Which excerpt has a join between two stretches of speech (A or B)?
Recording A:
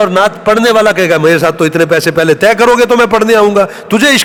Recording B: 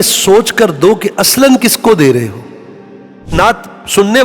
B